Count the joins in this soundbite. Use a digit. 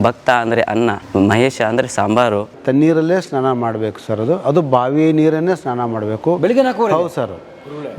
2